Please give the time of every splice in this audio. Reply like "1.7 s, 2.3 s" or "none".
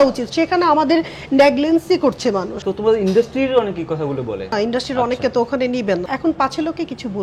2.6 s, 4.5 s, 6.1 s

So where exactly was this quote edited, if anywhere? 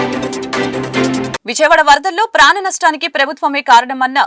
1.4 s

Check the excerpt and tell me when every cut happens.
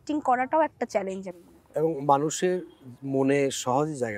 none

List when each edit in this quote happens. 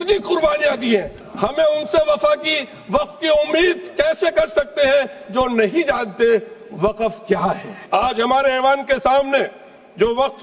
1.2 s, 7.7 s

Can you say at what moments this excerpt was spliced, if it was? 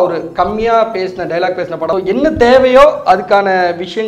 1.9 s

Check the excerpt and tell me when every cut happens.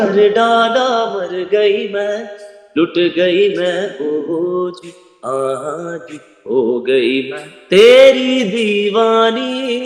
none

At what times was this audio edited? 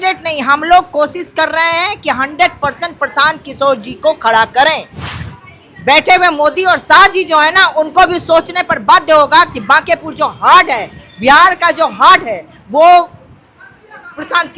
5.1 s

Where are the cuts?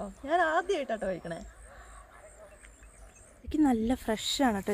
3.4 s

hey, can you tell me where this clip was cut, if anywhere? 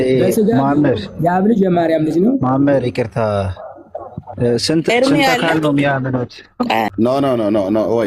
6.9 s

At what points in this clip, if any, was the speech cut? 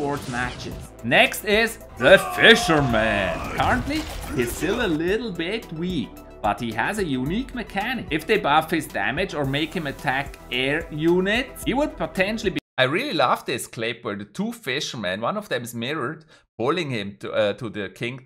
none

